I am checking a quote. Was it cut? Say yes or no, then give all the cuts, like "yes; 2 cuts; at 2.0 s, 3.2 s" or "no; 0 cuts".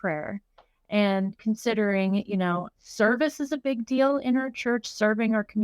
yes; 1 cut; at 2.8 s